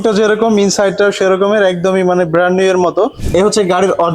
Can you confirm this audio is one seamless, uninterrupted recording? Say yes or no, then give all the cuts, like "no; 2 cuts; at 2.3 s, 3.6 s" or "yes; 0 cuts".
no; 1 cut; at 3.2 s